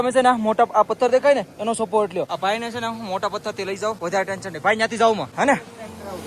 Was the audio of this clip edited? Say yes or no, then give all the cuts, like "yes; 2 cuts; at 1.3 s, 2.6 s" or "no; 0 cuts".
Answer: yes; 3 cuts; at 2.3 s, 4.0 s, 5.3 s